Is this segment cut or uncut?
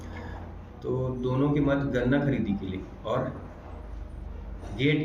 uncut